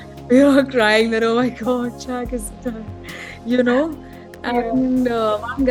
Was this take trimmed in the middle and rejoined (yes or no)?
no